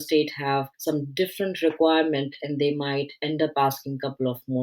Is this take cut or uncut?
uncut